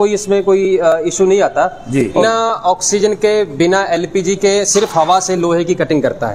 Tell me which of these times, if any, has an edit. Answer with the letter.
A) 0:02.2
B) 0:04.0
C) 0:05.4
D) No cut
A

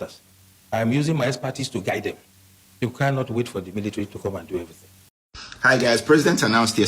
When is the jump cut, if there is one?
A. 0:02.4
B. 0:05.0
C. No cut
B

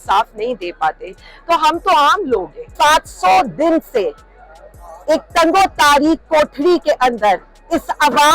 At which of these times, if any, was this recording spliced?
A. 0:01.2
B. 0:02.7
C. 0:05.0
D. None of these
B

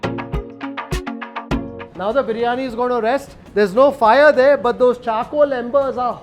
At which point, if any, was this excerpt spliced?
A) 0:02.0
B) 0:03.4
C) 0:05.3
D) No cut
B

